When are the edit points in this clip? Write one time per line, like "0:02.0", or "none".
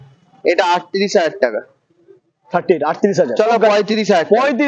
none

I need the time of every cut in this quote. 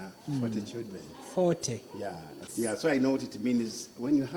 0:02.5

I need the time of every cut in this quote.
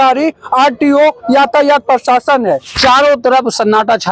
0:02.7

